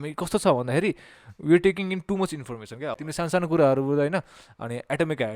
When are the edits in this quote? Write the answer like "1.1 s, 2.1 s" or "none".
3.0 s